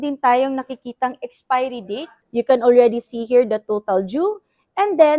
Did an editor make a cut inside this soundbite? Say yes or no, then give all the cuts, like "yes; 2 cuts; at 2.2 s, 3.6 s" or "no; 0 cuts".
yes; 1 cut; at 2.2 s